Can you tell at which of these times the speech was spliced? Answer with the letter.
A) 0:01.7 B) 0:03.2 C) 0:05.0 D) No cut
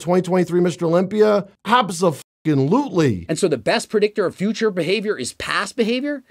B